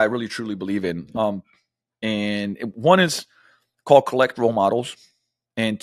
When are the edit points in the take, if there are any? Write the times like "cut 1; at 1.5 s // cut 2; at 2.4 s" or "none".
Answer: none